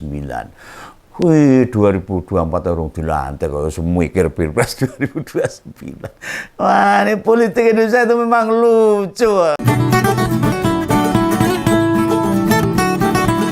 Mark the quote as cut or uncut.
cut